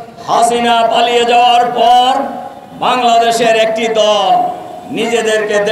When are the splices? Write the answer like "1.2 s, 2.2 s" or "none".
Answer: none